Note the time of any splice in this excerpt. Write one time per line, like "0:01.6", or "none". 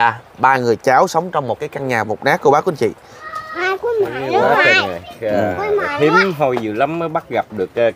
0:03.2